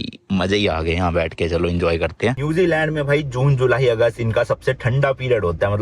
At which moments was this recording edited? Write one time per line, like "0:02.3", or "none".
0:02.4